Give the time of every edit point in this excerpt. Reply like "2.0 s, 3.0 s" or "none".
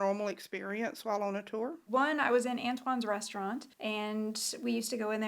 1.8 s, 3.7 s